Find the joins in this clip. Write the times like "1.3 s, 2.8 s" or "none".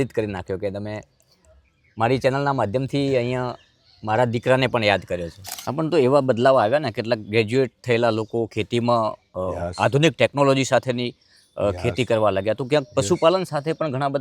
5.4 s